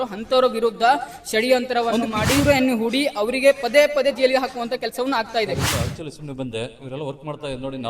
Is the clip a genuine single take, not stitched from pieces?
no; 2 cuts; at 2.1 s, 5.6 s

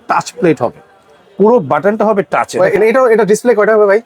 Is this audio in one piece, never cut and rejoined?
no; 1 cut; at 2.6 s

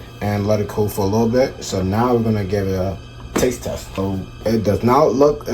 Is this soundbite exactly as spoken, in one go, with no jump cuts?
no; 1 cut; at 4.0 s

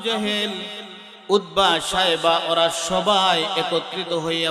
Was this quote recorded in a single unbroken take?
yes; 0 cuts

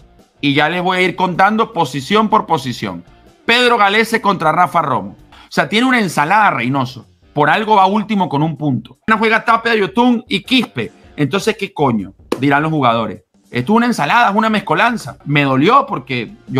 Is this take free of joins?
no; 3 cuts; at 5.3 s, 9.1 s, 15.2 s

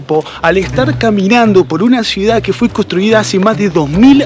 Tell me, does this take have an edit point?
no; 0 cuts

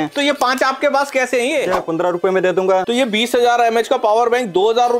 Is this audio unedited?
no; 2 cuts; at 1.8 s, 2.9 s

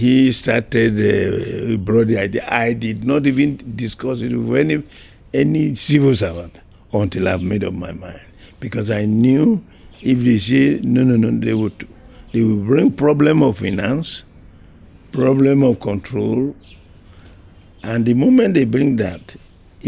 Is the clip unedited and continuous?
yes; 0 cuts

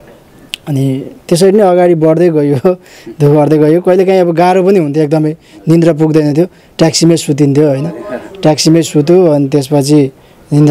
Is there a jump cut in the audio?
no; 0 cuts

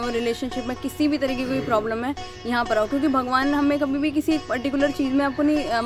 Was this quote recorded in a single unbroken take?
yes; 0 cuts

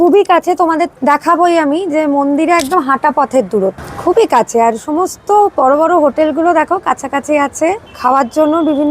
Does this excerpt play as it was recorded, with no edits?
no; 3 cuts; at 0.9 s, 3.9 s, 7.9 s

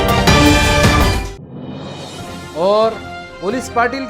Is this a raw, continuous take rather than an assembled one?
yes; 0 cuts

